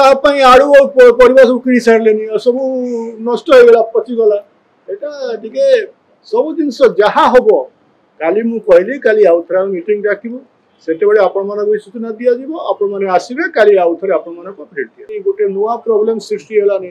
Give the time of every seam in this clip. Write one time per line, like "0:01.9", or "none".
0:15.0